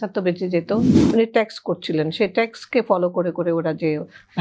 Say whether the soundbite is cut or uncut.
cut